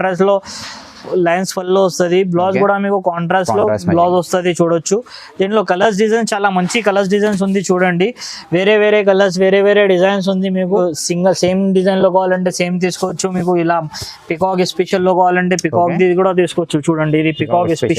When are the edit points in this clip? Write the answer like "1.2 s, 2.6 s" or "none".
10.8 s